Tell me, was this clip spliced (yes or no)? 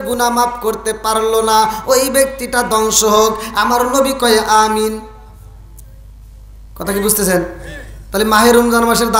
no